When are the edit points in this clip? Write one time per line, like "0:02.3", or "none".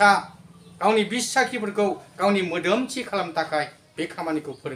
none